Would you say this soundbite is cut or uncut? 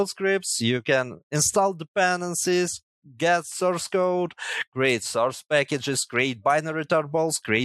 uncut